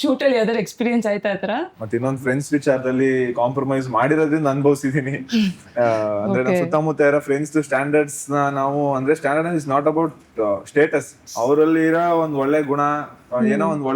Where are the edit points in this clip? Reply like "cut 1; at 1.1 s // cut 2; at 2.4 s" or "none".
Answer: cut 1; at 1.8 s // cut 2; at 11.2 s

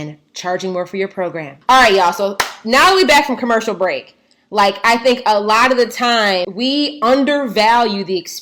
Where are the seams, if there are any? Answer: none

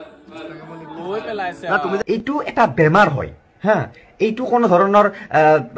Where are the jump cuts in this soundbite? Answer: cut 1; at 2.0 s

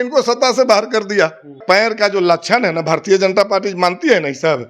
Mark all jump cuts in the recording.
cut 1; at 1.6 s

